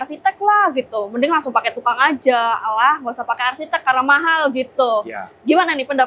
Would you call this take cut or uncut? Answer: uncut